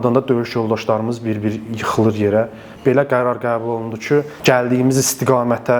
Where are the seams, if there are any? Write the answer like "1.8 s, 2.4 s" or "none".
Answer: 2.7 s, 4.3 s